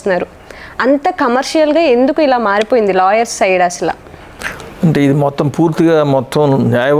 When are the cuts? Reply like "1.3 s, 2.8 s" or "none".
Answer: none